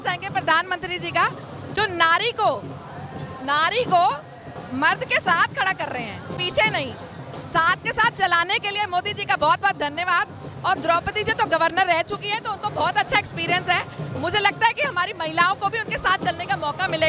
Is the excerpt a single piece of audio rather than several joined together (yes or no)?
yes